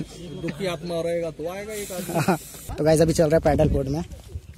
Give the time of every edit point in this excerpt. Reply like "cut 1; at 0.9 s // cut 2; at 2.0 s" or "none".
cut 1; at 2.7 s